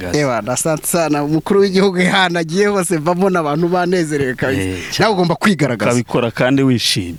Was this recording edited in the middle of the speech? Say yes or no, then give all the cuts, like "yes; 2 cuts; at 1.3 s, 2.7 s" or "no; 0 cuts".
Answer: no; 0 cuts